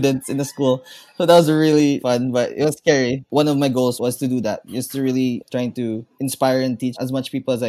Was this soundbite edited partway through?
yes; 5 cuts; at 2.0 s, 3.2 s, 4.0 s, 5.4 s, 6.9 s

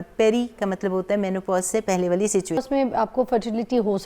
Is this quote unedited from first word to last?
no; 1 cut; at 2.6 s

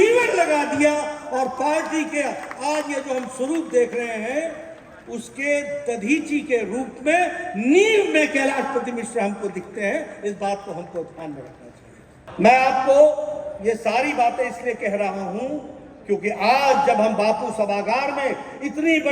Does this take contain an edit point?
yes; 1 cut; at 12.2 s

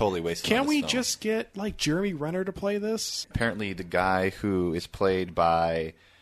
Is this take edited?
yes; 1 cut; at 3.3 s

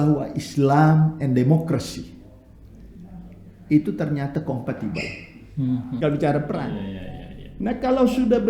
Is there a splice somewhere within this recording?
yes; 1 cut; at 6.0 s

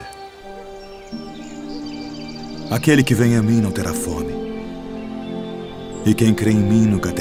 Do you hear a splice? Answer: no; 0 cuts

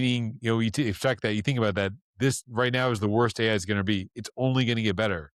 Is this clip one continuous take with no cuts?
yes; 0 cuts

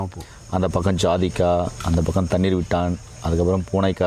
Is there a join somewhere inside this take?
no; 0 cuts

